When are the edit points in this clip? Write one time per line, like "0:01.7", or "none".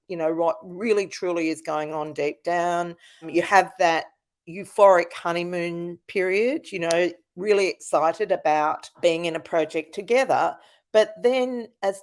0:09.0